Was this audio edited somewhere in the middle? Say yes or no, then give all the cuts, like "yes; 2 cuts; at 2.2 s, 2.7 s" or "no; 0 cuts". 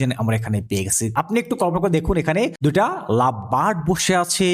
yes; 2 cuts; at 1.1 s, 2.5 s